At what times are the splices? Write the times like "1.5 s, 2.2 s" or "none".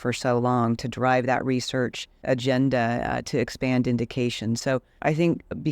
2.1 s